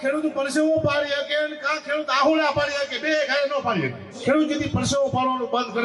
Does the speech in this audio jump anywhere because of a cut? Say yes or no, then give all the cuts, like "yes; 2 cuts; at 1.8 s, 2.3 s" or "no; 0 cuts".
yes; 1 cut; at 4.2 s